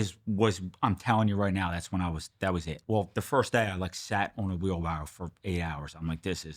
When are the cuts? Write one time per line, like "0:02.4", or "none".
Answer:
0:02.7